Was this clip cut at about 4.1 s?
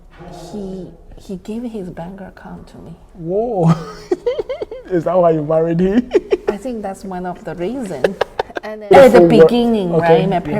no; 1 cut; at 8.6 s

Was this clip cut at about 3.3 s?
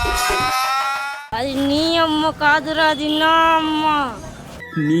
no; 1 cut; at 1.2 s

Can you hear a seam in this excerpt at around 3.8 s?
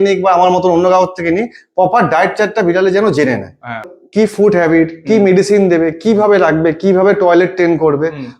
yes; 1 cut; at 3.8 s

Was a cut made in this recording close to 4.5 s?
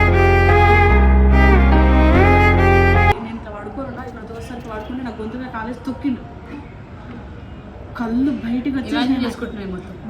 no; 1 cut; at 3.2 s

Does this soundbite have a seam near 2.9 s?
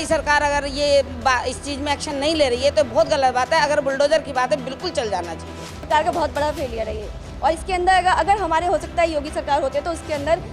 no; 1 cut; at 5.9 s

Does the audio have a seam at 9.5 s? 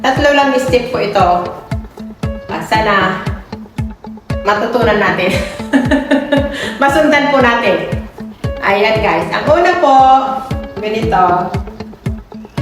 no; 1 cut; at 11.5 s

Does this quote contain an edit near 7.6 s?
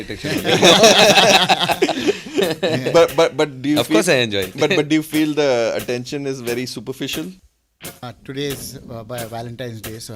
yes; 1 cut; at 7.6 s

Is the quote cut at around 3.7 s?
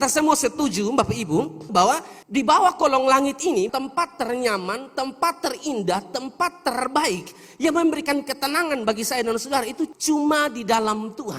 yes; 1 cut; at 3.7 s

